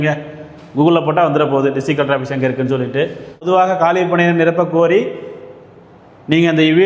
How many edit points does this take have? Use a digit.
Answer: 1